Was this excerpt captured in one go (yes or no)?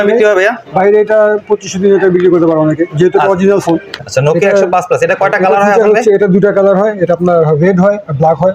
no